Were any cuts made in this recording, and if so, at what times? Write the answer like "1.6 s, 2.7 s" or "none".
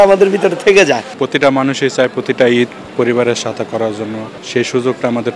1.1 s, 4.3 s